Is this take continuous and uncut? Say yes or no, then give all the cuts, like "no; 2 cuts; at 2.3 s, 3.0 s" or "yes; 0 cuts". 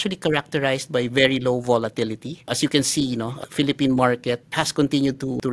yes; 0 cuts